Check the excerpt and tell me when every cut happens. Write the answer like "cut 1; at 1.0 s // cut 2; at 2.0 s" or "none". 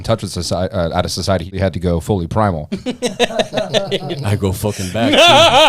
cut 1; at 1.6 s